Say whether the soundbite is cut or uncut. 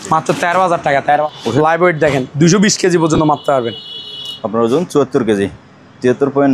cut